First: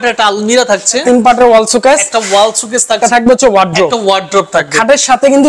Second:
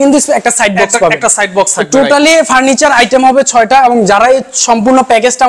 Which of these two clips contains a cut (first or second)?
first